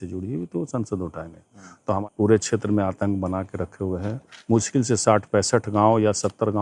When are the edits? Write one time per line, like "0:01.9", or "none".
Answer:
0:02.0